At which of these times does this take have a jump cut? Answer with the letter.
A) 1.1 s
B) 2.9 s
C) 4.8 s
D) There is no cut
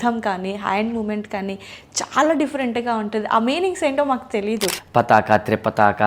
C